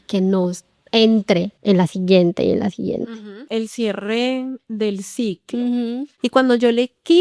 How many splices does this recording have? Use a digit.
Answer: 3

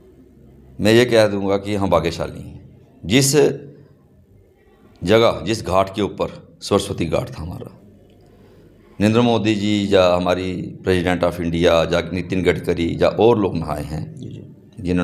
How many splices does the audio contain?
0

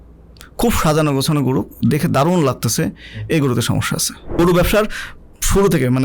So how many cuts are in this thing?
1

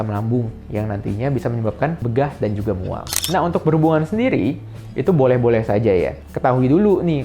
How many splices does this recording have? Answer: 1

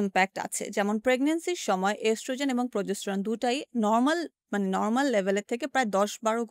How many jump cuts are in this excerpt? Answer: 0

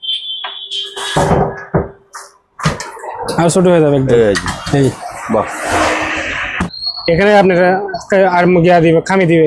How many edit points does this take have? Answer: 1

